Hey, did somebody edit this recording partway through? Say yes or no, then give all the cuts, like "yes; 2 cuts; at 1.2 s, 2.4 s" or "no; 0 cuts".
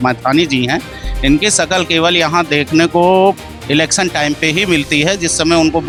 no; 0 cuts